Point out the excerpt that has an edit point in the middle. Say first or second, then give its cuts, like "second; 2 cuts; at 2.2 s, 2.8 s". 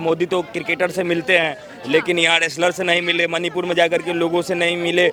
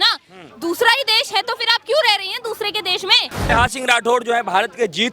second; 1 cut; at 3.5 s